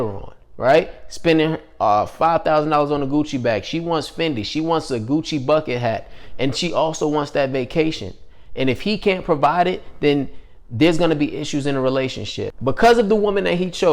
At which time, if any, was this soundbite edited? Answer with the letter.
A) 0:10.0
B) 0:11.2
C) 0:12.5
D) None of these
C